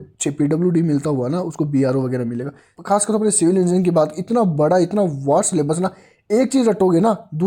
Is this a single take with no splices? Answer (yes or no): no